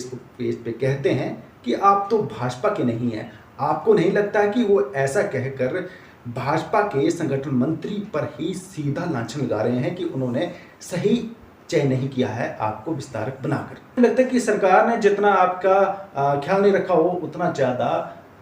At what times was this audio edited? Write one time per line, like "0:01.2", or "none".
0:14.0